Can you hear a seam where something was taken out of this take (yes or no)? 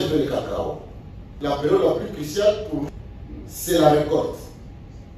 yes